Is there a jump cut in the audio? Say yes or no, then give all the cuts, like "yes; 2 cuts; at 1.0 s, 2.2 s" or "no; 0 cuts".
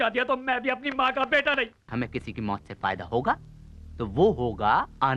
yes; 1 cut; at 1.9 s